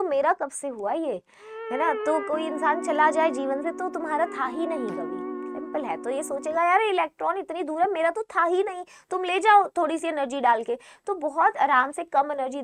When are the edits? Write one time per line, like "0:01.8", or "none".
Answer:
none